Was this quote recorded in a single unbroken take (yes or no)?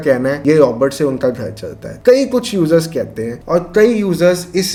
yes